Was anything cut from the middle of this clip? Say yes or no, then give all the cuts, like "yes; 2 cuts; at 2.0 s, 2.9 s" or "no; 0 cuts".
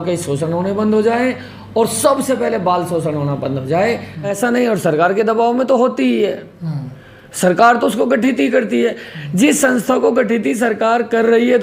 yes; 1 cut; at 4.3 s